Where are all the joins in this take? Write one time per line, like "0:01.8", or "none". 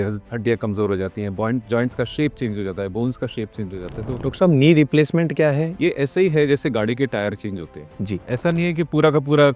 0:04.2
0:05.7